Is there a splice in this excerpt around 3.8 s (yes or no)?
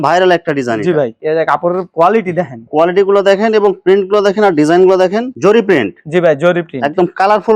no